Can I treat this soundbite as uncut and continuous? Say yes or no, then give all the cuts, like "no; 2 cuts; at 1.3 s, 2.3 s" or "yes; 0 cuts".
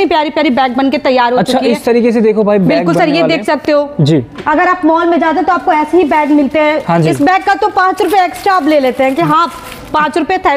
yes; 0 cuts